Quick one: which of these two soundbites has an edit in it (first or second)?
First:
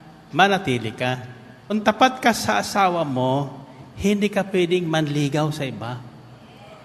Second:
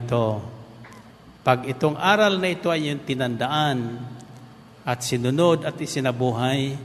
first